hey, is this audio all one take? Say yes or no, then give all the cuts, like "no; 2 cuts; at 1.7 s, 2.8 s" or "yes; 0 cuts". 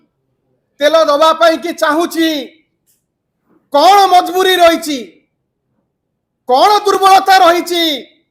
yes; 0 cuts